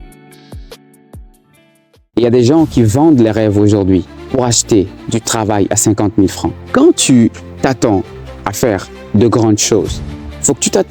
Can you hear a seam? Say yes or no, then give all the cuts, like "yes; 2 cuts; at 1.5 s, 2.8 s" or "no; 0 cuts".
yes; 1 cut; at 2.0 s